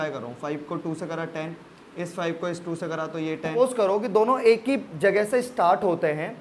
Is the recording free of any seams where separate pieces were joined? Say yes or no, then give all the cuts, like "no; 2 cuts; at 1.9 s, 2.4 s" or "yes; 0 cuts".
no; 1 cut; at 3.5 s